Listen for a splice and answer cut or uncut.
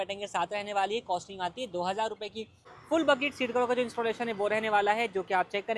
cut